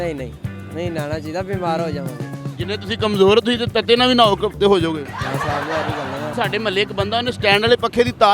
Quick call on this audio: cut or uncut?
cut